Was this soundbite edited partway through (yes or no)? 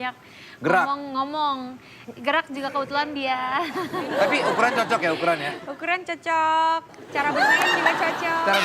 yes